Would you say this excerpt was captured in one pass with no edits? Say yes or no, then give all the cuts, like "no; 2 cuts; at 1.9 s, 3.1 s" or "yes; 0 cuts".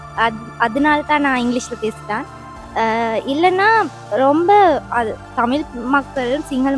yes; 0 cuts